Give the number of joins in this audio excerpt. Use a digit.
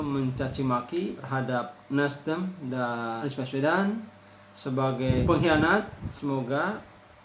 4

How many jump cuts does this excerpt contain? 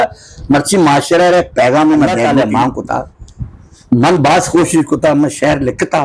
1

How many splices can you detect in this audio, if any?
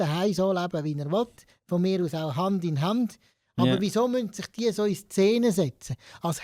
0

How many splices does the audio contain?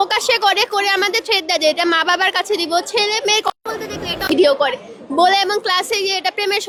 0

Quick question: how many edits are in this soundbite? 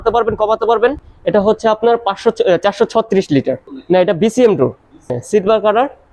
1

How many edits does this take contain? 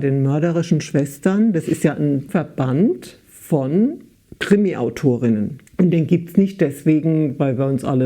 2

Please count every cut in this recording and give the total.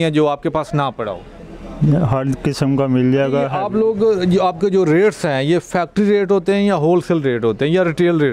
1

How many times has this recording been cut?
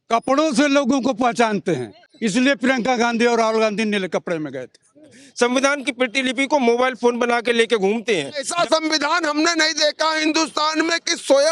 2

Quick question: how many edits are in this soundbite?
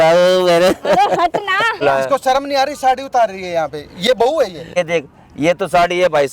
2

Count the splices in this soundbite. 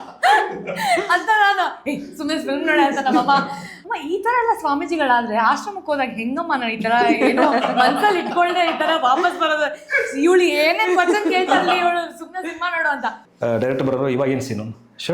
2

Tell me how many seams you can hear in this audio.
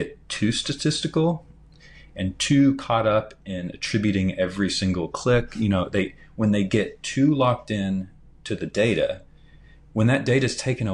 0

